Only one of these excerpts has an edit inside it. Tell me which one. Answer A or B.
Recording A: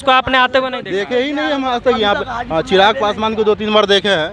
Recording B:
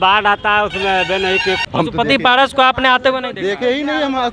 B